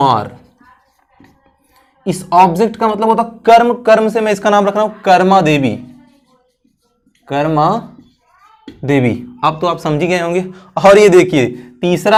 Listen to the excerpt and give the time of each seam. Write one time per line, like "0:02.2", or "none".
none